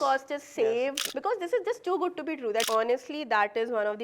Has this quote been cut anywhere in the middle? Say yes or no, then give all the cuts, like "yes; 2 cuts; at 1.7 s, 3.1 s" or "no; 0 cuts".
yes; 2 cuts; at 1.0 s, 2.7 s